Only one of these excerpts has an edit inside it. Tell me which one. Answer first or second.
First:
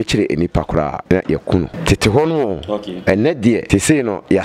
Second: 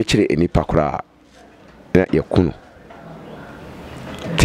first